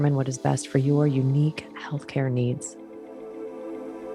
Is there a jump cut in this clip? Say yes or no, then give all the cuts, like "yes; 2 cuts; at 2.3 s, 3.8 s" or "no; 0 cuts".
yes; 1 cut; at 2.7 s